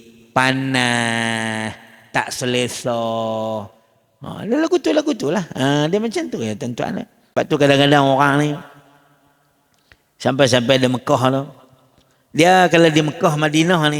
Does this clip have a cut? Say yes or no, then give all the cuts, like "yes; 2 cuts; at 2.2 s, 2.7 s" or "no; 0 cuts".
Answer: yes; 1 cut; at 7.2 s